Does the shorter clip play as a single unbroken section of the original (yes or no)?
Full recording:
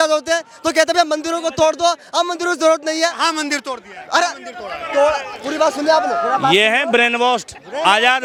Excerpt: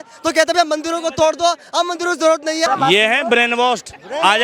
no